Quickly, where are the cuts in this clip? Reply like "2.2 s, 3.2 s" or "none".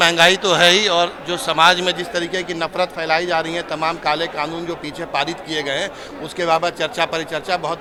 none